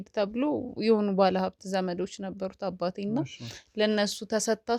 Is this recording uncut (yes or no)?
yes